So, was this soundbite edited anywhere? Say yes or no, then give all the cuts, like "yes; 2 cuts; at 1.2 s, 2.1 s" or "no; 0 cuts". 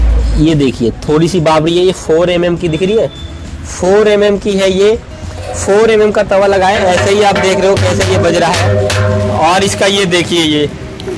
no; 0 cuts